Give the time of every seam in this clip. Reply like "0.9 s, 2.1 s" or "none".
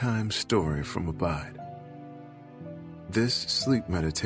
1.4 s, 3.1 s